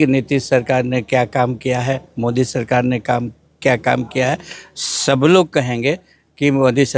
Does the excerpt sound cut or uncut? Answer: uncut